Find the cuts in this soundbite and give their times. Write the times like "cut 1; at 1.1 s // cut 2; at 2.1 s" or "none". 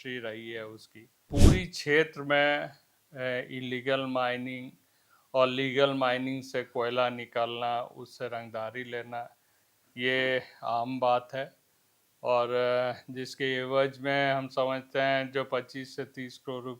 cut 1; at 1.2 s